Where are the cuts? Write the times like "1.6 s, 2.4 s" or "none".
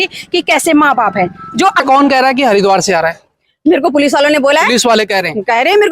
1.8 s